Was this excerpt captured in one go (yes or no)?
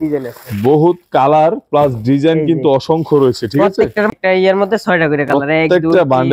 no